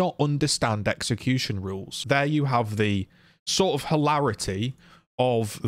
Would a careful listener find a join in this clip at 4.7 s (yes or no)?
no